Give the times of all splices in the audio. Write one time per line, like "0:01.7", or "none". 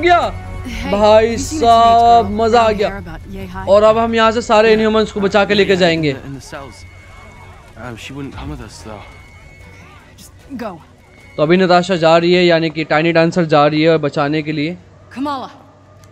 none